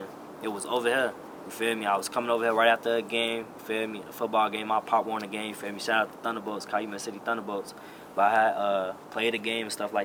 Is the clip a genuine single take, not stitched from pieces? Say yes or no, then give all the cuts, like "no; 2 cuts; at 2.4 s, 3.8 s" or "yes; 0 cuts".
yes; 0 cuts